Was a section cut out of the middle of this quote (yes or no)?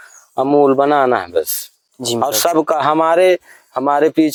no